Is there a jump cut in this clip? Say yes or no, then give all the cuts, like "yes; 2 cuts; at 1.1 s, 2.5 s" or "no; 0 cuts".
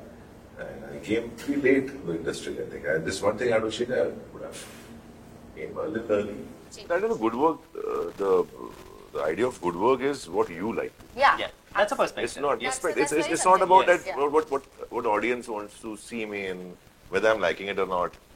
yes; 1 cut; at 6.7 s